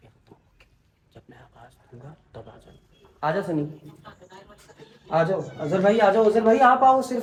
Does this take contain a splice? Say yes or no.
no